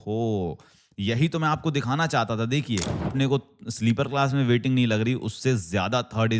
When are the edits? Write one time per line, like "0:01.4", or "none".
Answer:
0:03.0

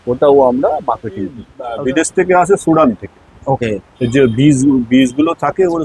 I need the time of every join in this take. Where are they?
0:01.5

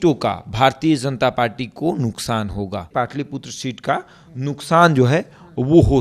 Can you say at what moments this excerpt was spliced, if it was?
0:02.9

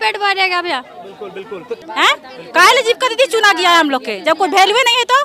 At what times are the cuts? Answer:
0:01.7

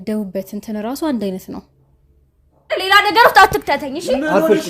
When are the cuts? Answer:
0:02.7

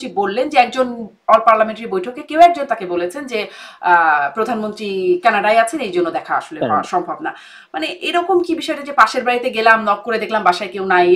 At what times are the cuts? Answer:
none

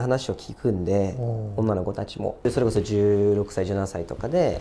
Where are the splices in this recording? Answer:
0:02.4

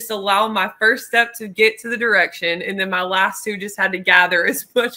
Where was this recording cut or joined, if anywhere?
none

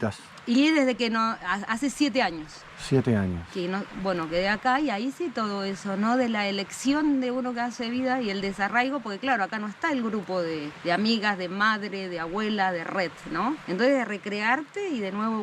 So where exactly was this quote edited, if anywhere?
none

